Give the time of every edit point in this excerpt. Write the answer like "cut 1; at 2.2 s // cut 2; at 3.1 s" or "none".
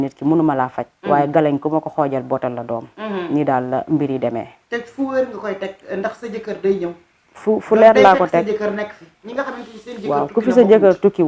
none